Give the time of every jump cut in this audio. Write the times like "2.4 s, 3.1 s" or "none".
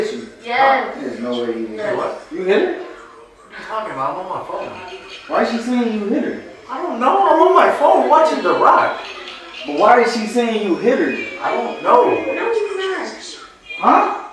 none